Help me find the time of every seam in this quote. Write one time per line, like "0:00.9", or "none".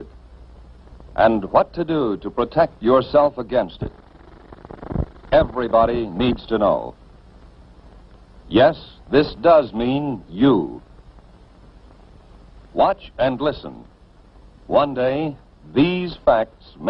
0:03.8